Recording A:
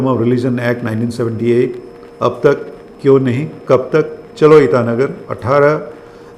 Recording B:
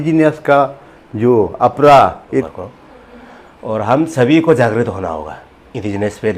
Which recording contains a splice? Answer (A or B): B